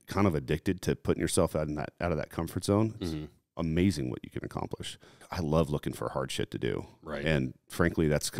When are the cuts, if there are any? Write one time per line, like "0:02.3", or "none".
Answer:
0:05.2

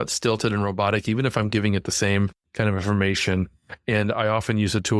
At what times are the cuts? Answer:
0:02.4

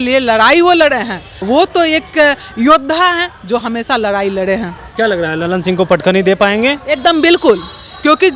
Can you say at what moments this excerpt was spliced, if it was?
0:01.3
0:04.8

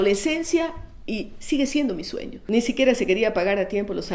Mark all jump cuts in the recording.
0:02.3

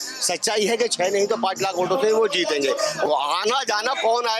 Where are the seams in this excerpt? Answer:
0:03.0

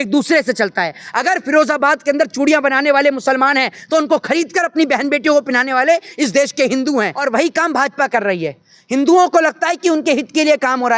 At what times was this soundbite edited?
0:07.2

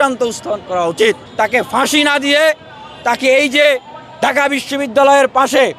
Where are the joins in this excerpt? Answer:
0:01.3

